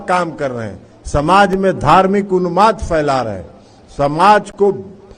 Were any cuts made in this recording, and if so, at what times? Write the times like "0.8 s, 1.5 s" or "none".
none